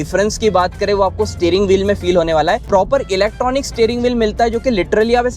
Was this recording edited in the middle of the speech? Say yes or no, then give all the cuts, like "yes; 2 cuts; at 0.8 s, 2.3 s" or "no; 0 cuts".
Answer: yes; 1 cut; at 2.6 s